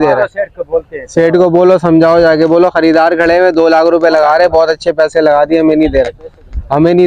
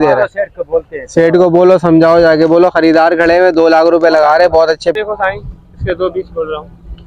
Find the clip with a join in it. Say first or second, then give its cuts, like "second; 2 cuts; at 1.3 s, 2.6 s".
second; 1 cut; at 5.0 s